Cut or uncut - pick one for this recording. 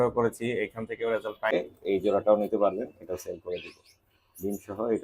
cut